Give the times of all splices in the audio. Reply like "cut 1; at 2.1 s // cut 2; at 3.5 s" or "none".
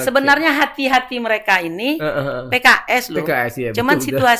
none